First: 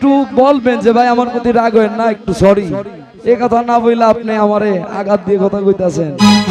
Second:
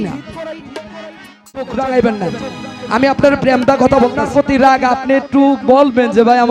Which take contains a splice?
second; 2 cuts; at 1.7 s, 4.2 s

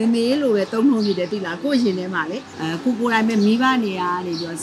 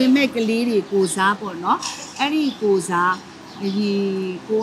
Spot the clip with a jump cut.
first; 1 cut; at 2.5 s

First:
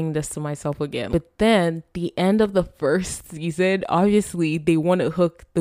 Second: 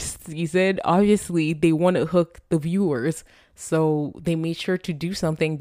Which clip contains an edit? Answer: first; 1 cut; at 1.1 s

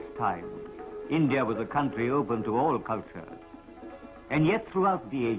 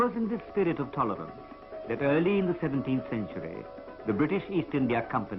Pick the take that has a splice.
second; 1 cut; at 2.7 s

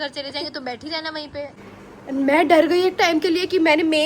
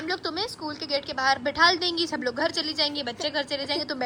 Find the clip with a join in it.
first; 1 cut; at 1.6 s

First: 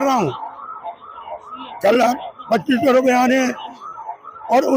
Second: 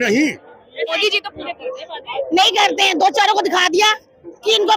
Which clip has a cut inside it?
second; 1 cut; at 1.0 s

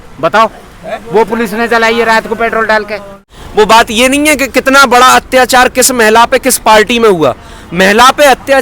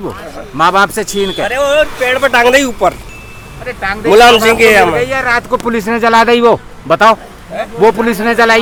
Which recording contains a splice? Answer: first; 1 cut; at 3.4 s

